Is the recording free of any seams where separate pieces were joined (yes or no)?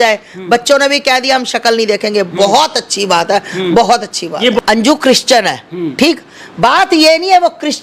yes